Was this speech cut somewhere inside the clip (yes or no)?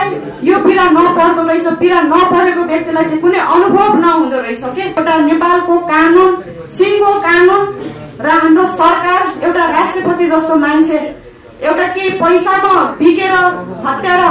yes